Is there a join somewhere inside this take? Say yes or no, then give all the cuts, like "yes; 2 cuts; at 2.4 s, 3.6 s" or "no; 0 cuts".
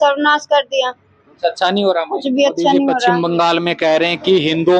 yes; 1 cut; at 3.2 s